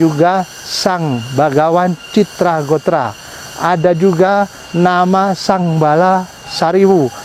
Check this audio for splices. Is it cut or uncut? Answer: uncut